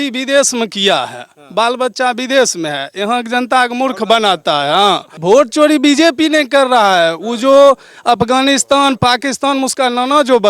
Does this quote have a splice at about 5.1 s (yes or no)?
yes